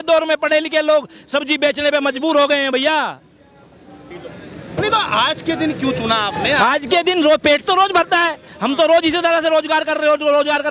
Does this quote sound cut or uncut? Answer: uncut